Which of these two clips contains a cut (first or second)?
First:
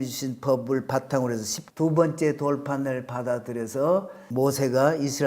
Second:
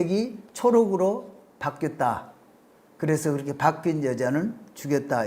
first